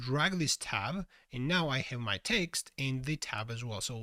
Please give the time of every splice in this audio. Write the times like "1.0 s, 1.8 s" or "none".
none